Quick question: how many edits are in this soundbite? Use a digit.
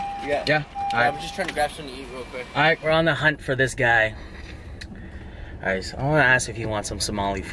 1